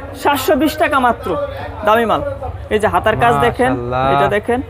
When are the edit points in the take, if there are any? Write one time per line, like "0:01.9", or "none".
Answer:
none